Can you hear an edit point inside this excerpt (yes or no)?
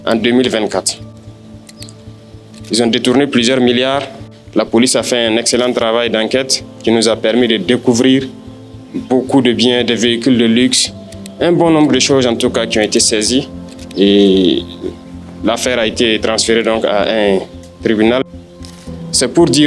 no